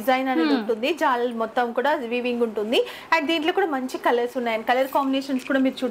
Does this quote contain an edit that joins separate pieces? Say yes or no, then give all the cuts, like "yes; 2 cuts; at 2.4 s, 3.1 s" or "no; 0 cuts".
no; 0 cuts